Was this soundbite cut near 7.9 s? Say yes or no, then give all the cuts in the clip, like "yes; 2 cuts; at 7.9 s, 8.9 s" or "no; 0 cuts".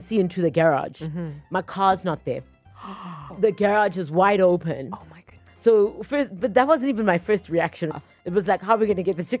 yes; 2 cuts; at 3.3 s, 7.9 s